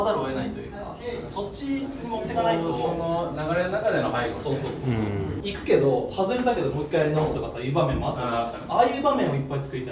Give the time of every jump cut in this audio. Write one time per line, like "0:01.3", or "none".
0:05.5